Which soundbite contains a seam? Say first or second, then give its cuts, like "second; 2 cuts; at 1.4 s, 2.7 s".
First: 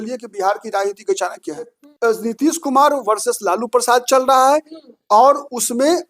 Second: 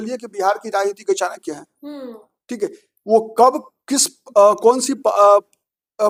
first; 1 cut; at 1.8 s